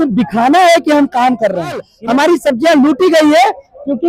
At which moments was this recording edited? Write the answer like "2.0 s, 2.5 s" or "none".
1.9 s